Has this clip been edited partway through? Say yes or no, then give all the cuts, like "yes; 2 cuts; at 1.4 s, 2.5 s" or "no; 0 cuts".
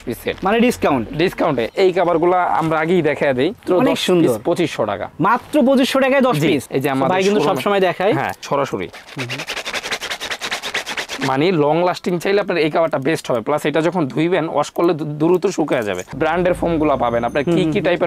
yes; 4 cuts; at 1.7 s, 3.6 s, 6.7 s, 16.1 s